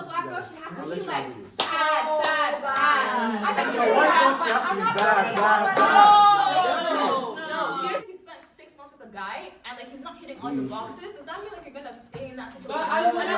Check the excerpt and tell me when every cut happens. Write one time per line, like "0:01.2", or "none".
0:03.6
0:08.1